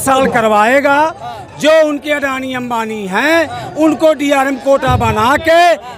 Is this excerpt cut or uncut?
uncut